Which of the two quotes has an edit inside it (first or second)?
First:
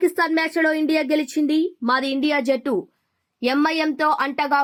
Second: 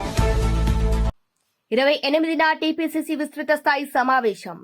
second